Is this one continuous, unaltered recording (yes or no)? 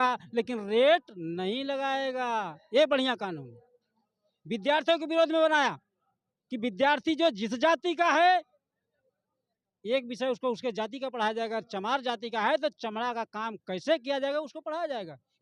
yes